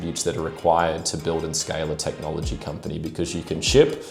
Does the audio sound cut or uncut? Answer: uncut